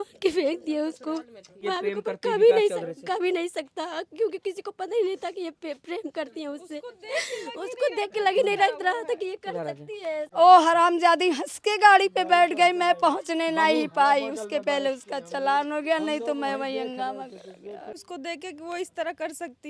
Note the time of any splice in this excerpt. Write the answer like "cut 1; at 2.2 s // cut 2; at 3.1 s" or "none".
cut 1; at 1.6 s // cut 2; at 10.2 s // cut 3; at 18.0 s